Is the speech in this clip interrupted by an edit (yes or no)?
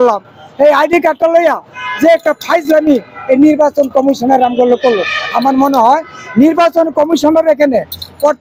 no